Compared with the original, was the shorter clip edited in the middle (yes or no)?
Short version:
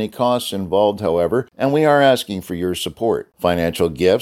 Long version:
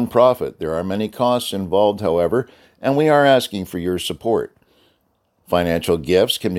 yes